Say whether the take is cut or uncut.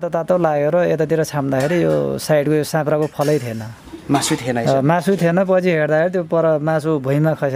uncut